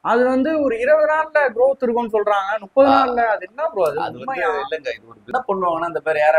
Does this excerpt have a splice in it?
yes; 1 cut; at 5.3 s

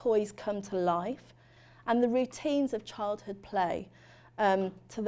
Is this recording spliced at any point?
no; 0 cuts

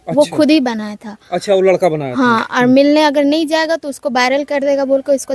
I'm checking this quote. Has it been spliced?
no; 0 cuts

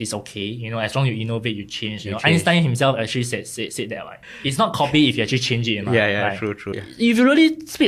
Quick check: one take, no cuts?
no; 2 cuts; at 4.3 s, 6.8 s

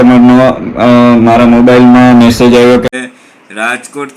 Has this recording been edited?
yes; 1 cut; at 3.0 s

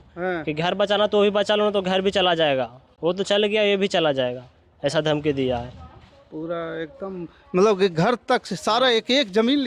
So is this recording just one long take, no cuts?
yes; 0 cuts

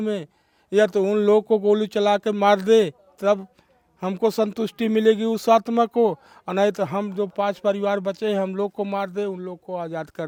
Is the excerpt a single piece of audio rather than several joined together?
yes; 0 cuts

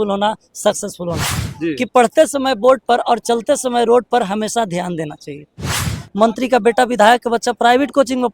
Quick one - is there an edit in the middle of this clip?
yes; 2 cuts; at 1.5 s, 5.8 s

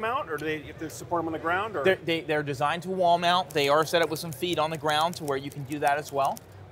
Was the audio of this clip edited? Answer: no; 0 cuts

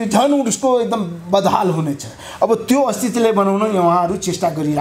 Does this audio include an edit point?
no; 0 cuts

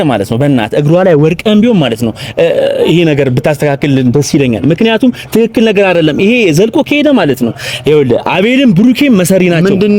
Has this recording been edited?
no; 0 cuts

